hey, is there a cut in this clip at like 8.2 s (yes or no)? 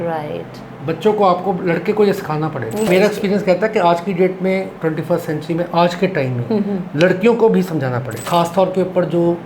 yes